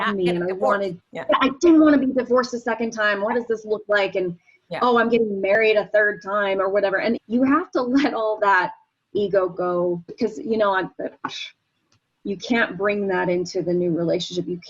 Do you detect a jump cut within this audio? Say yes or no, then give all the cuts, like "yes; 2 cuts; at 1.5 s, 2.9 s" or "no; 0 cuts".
yes; 1 cut; at 1.1 s